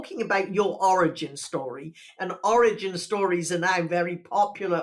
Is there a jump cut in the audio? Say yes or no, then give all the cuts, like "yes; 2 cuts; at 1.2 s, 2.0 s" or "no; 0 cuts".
no; 0 cuts